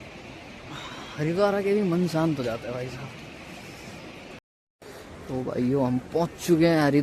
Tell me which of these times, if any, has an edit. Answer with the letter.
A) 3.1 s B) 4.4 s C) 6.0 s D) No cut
B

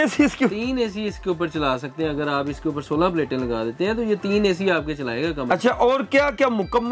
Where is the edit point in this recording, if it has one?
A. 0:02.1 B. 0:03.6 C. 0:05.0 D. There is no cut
D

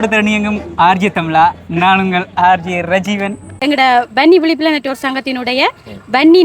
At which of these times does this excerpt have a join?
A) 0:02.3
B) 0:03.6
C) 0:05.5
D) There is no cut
B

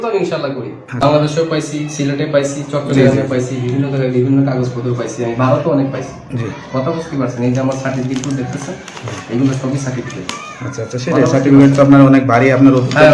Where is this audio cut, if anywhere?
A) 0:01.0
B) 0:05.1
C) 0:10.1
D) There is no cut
A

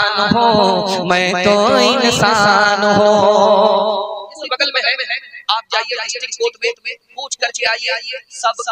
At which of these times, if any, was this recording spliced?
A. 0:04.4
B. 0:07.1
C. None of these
A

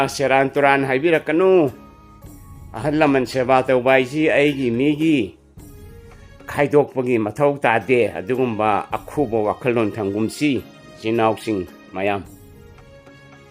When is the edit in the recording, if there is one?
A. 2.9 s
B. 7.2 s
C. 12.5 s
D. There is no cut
C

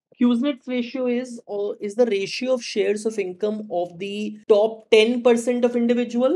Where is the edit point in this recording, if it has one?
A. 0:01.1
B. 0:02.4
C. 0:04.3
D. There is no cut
C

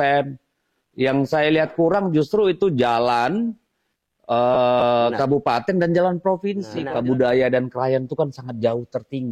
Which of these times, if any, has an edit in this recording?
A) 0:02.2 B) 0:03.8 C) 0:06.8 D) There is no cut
C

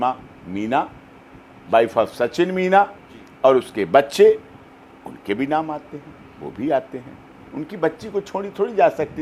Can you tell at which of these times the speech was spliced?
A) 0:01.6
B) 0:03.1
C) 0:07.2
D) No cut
D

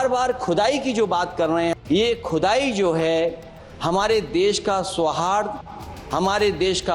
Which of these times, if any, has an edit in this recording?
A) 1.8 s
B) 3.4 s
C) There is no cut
A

